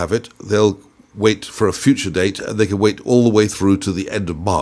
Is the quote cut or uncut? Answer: uncut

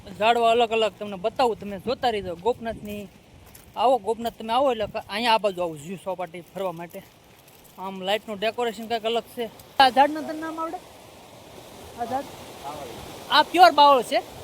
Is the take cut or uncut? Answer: cut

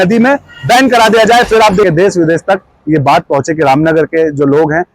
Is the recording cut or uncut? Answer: cut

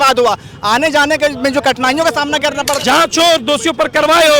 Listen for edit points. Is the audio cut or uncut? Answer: cut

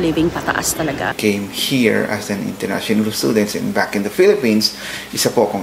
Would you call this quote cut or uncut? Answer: cut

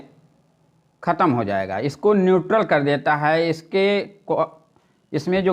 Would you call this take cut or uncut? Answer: uncut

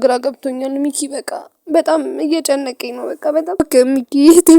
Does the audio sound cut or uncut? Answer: cut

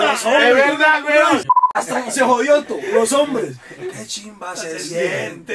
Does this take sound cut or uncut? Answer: cut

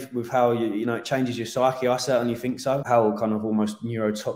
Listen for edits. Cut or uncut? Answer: cut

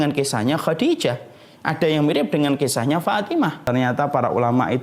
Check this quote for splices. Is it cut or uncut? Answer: cut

